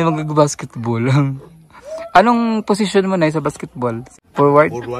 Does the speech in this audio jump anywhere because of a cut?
yes; 1 cut; at 4.1 s

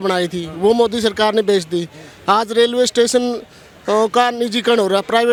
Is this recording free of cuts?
yes; 0 cuts

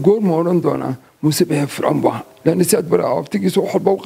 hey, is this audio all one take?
yes; 0 cuts

